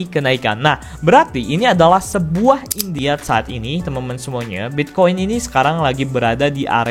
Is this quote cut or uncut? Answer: cut